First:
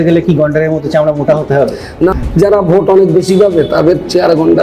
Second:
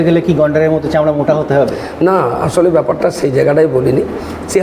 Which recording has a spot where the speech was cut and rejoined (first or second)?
first